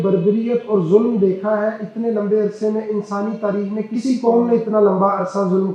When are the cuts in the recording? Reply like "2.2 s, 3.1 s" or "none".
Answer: none